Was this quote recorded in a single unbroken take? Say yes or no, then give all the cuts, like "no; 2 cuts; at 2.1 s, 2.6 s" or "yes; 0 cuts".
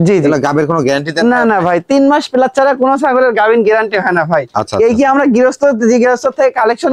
yes; 0 cuts